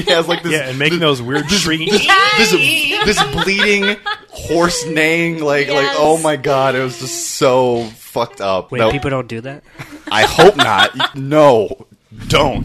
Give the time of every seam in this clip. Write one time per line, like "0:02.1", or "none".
0:08.7
0:11.0